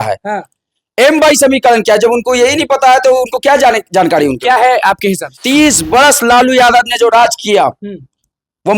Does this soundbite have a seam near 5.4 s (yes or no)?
yes